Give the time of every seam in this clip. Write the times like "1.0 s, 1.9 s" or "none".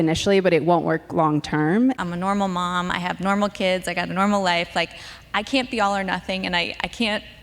2.0 s